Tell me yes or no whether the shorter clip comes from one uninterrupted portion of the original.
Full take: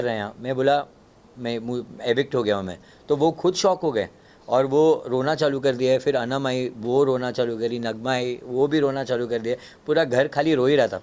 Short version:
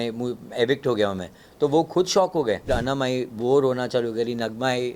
no